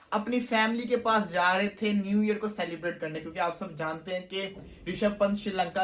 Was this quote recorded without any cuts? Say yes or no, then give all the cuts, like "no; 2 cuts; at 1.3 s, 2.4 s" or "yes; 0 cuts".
yes; 0 cuts